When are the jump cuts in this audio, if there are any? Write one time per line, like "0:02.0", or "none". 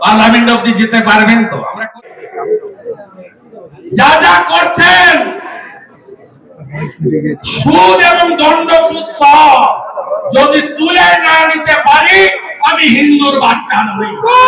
0:02.0